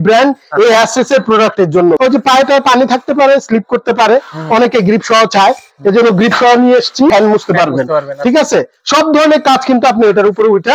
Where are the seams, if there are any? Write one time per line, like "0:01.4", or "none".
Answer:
0:02.0
0:07.1